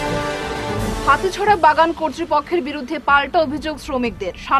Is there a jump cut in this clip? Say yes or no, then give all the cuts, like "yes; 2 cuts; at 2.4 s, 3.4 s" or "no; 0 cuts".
yes; 1 cut; at 1.0 s